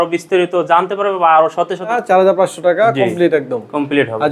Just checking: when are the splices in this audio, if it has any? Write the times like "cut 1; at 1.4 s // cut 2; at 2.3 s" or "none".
cut 1; at 2.0 s